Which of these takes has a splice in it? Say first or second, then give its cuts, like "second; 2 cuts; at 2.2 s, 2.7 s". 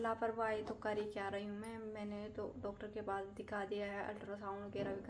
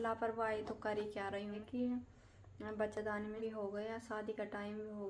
second; 2 cuts; at 1.6 s, 3.4 s